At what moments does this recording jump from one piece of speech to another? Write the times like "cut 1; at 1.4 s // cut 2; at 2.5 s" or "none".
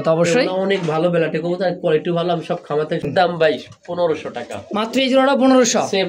cut 1; at 3.0 s